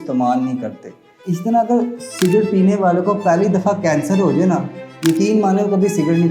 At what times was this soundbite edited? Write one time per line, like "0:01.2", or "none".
0:01.1